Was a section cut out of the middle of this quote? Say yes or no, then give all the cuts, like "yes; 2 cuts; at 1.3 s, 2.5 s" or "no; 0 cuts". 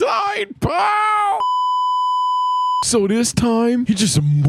no; 0 cuts